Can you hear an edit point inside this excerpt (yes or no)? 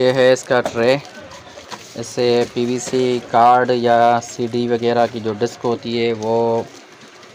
no